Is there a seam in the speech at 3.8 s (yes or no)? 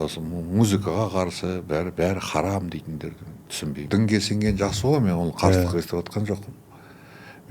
yes